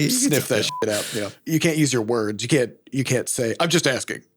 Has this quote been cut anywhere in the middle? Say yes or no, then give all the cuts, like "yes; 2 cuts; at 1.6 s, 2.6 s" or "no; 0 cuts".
yes; 1 cut; at 1.0 s